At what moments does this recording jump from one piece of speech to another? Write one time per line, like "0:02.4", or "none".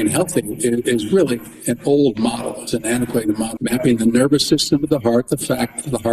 0:03.5

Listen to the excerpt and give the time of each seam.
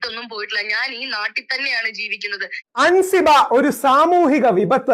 0:02.6

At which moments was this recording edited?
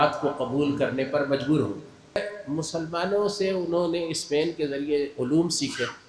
0:02.2

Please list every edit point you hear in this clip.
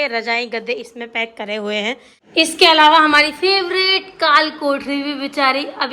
0:02.1

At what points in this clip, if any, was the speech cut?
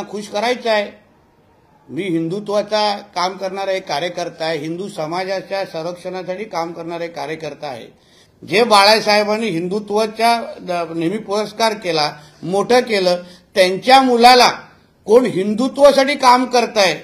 0:08.2

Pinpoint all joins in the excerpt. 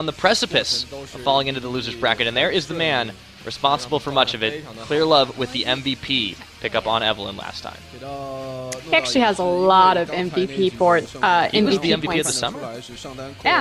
none

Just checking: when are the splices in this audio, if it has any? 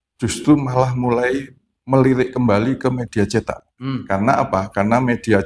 0:03.6

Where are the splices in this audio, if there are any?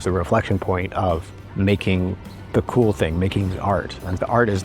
0:01.4
0:02.3

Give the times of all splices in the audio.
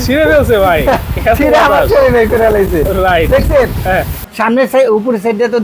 0:04.1

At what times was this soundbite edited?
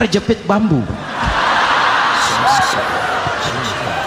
none

